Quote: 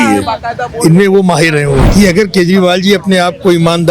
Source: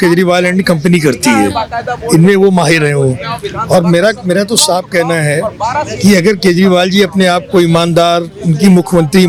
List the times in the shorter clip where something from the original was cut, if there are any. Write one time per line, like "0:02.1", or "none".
0:01.9